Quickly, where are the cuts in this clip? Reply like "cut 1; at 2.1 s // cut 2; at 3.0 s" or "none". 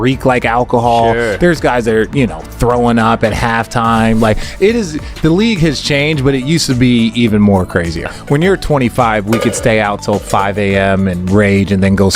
cut 1; at 7.9 s